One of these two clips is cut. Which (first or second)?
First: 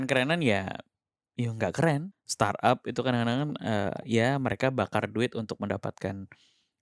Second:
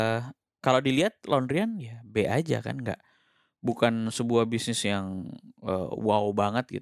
first